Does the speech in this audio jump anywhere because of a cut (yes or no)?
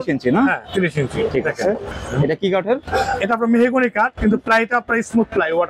yes